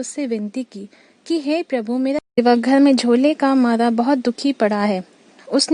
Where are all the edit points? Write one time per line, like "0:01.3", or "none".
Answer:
0:02.4